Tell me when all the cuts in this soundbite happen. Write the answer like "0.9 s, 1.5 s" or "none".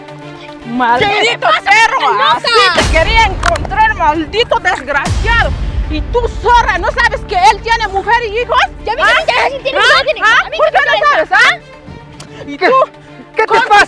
none